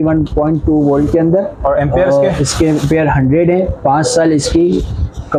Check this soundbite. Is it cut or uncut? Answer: uncut